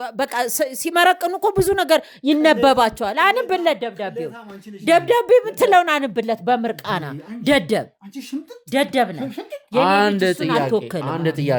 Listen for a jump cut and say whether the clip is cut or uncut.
uncut